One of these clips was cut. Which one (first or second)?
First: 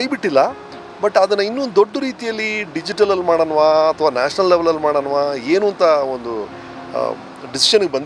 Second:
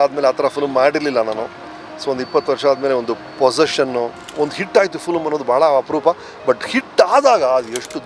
second